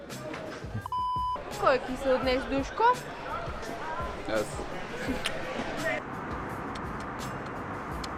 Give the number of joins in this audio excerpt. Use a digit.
0